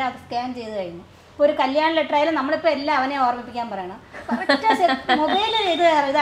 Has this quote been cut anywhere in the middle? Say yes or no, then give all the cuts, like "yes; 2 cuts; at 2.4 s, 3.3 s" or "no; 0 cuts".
no; 0 cuts